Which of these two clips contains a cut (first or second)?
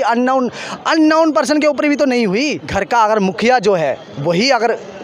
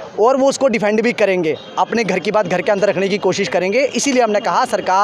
first